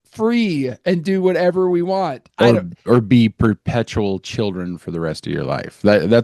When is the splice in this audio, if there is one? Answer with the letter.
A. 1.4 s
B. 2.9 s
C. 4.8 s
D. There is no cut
D